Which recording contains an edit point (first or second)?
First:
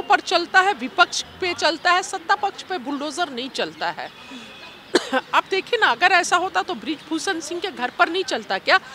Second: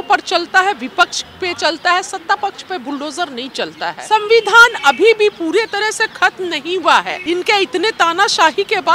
second